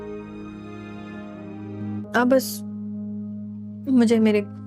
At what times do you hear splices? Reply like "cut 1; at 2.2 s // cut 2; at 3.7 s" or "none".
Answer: cut 1; at 1.8 s